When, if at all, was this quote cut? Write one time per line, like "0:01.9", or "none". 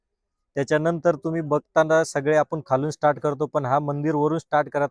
none